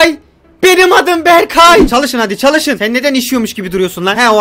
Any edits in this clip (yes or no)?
yes